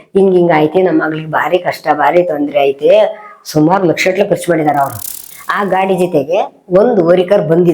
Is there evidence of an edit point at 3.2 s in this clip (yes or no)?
no